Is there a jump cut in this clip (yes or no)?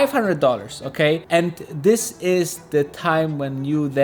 no